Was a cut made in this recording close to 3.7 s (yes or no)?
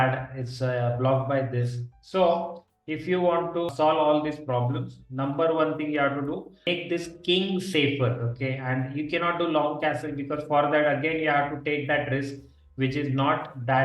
yes